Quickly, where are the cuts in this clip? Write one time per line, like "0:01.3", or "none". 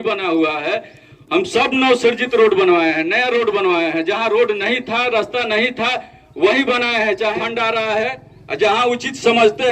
0:07.4